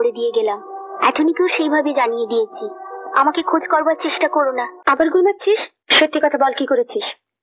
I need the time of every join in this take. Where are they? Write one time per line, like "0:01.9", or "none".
0:04.7
0:05.8